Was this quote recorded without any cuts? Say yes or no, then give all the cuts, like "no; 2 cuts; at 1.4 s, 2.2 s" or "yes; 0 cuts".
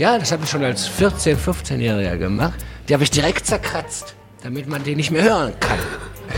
no; 2 cuts; at 2.6 s, 4.3 s